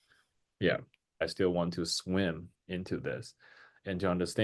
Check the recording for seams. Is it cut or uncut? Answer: cut